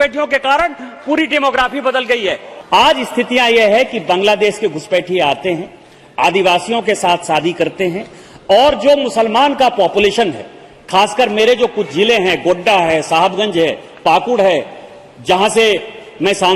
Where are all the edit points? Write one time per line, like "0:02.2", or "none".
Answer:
0:02.5